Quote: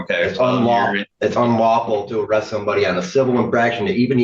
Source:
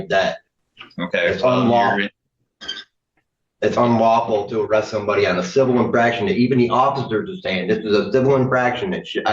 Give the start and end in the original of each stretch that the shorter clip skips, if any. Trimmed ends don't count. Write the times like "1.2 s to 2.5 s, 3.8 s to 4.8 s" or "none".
2.1 s to 3.5 s